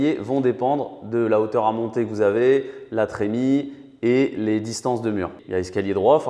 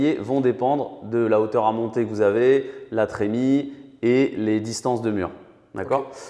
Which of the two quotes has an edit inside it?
first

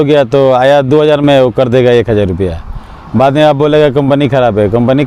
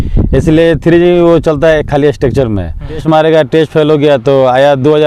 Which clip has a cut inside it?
second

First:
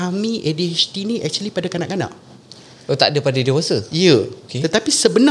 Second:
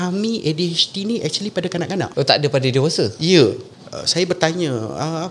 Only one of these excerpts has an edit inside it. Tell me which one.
second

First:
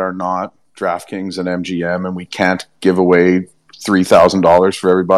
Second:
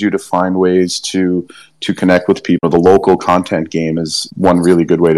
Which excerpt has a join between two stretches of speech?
second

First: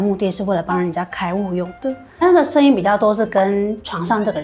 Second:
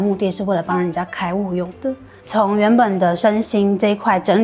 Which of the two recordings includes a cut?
first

